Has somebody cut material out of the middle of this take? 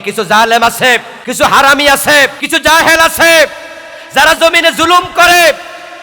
yes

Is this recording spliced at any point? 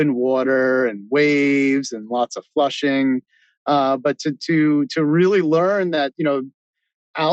no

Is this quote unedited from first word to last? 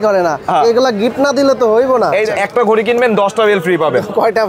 no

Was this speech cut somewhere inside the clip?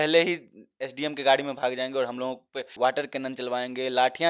yes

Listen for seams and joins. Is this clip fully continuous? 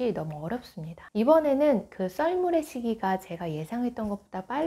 yes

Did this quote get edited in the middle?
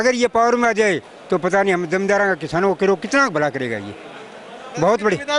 no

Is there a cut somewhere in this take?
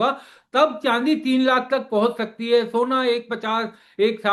no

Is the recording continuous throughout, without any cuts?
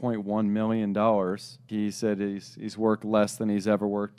no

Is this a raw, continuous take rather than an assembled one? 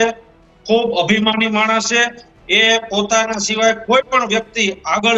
yes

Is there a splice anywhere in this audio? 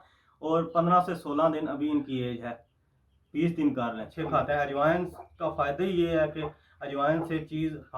yes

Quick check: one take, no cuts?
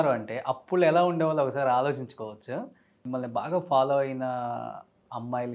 no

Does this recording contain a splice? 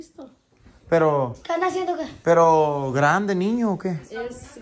no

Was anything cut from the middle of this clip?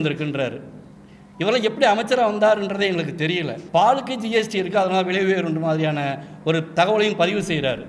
yes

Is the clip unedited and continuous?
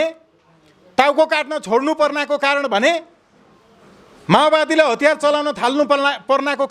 yes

